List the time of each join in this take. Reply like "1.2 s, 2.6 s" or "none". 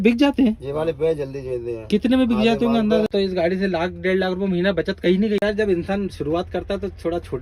3.1 s, 5.4 s

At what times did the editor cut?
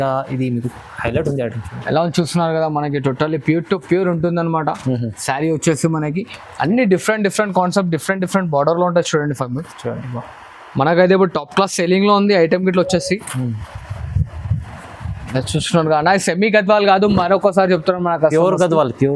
none

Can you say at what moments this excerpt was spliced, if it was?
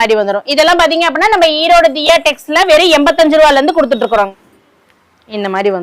4.3 s

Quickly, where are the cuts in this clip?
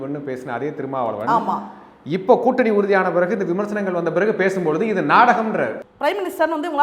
none

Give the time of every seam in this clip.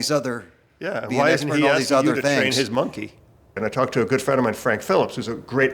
3.6 s

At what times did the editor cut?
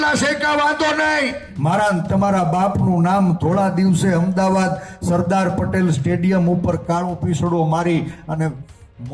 1.5 s

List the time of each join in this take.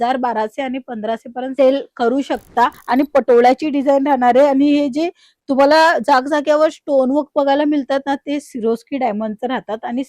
2.8 s

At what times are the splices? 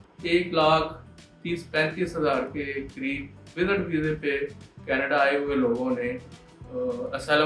none

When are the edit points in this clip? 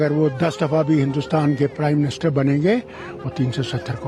none

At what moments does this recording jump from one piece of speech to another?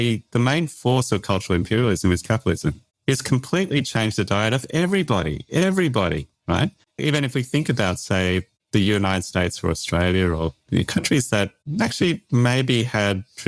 none

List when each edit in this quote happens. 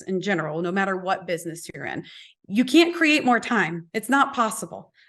3.9 s

